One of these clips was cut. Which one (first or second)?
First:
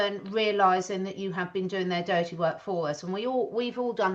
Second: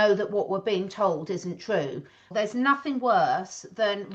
second